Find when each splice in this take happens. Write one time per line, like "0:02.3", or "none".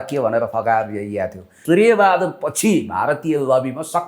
0:01.5